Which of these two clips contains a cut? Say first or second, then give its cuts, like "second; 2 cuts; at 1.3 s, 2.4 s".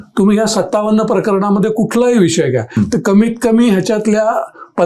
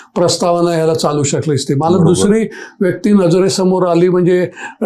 first; 1 cut; at 2.7 s